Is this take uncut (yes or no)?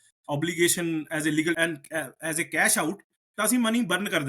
no